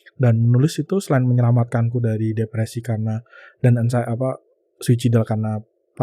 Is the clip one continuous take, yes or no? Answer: yes